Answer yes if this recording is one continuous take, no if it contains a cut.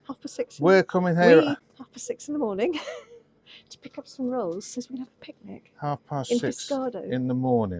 no